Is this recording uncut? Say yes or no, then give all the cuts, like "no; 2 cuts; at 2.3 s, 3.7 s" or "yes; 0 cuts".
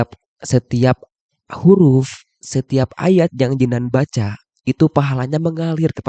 yes; 0 cuts